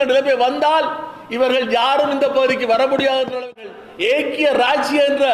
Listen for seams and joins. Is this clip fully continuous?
no; 1 cut; at 4.1 s

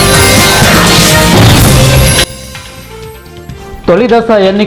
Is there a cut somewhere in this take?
no; 0 cuts

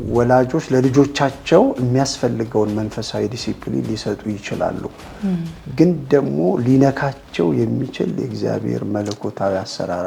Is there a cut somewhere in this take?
no; 0 cuts

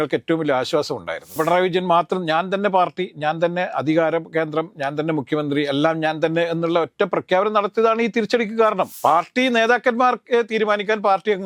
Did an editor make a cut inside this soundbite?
yes; 2 cuts; at 1.4 s, 8.9 s

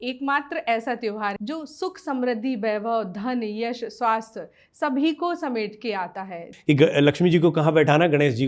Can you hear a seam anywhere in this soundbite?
yes; 2 cuts; at 1.4 s, 6.5 s

